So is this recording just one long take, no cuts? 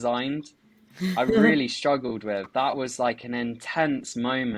yes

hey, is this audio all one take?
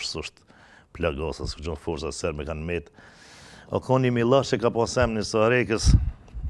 yes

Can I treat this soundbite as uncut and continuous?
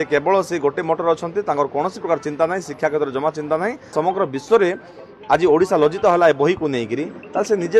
no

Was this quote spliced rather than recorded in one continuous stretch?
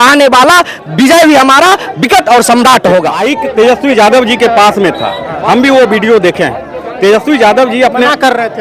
yes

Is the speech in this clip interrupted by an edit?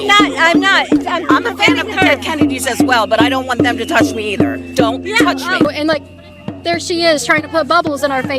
yes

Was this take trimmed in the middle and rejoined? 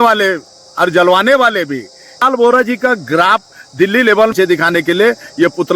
yes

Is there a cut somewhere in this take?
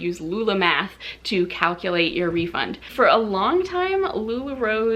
yes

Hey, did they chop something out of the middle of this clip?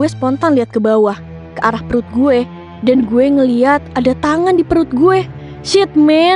no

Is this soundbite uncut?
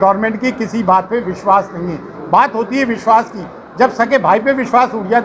yes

